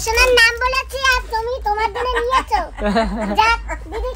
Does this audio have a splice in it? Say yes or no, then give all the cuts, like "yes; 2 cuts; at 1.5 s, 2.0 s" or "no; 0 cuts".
no; 0 cuts